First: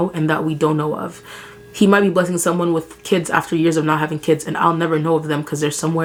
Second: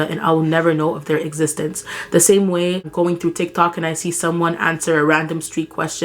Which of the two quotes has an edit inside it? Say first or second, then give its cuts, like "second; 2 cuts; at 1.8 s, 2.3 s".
second; 1 cut; at 2.9 s